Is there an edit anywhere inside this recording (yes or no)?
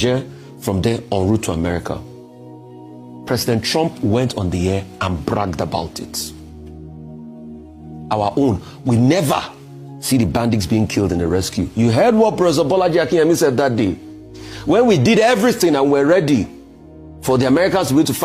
no